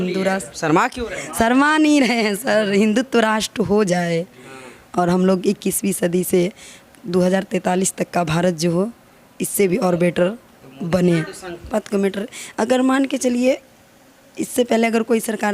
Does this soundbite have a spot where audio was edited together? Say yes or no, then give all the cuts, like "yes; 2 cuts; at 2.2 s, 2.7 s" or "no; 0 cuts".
yes; 1 cut; at 11.7 s